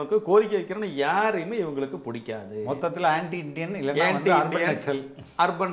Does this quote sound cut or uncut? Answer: uncut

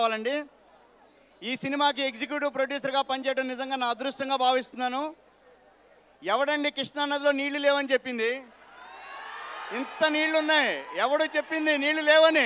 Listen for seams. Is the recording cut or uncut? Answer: uncut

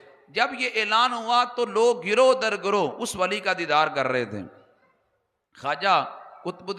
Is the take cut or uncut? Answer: uncut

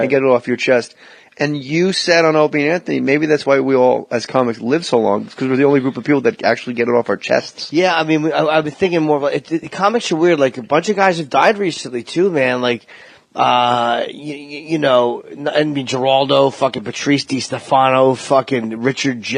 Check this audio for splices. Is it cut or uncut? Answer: cut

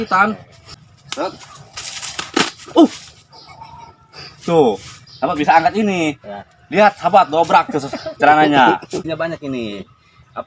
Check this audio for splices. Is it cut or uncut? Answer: cut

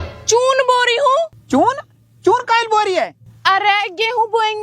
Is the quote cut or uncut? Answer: cut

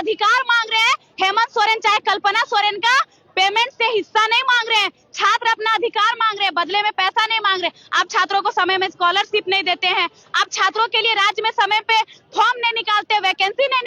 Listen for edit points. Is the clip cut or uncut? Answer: uncut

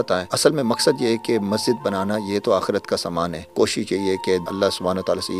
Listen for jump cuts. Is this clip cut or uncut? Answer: cut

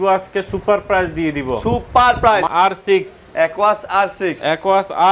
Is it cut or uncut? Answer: cut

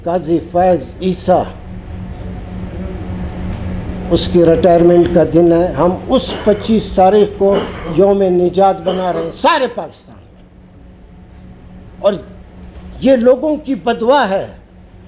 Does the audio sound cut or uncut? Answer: uncut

